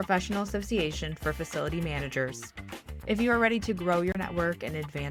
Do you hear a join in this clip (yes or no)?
no